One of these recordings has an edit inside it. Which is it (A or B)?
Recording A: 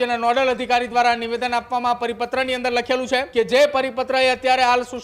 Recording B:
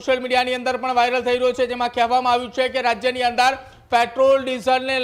A